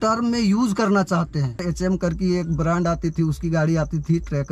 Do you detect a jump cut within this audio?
yes; 1 cut; at 1.6 s

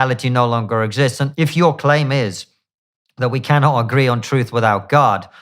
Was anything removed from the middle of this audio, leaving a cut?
yes; 1 cut; at 1.2 s

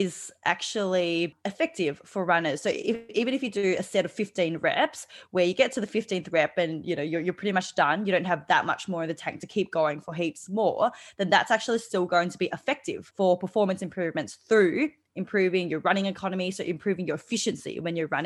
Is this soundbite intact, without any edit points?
no; 2 cuts; at 1.4 s, 13.0 s

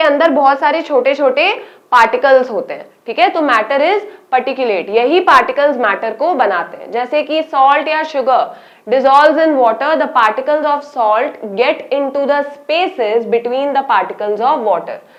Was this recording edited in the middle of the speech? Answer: no; 0 cuts

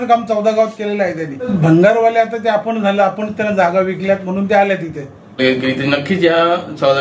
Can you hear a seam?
yes; 2 cuts; at 1.5 s, 5.4 s

